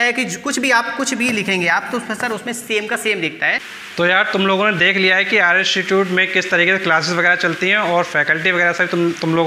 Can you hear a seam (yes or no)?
yes